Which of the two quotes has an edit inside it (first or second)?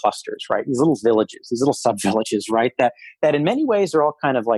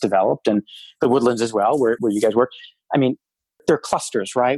second